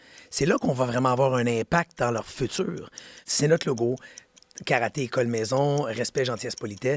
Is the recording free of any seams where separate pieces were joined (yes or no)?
no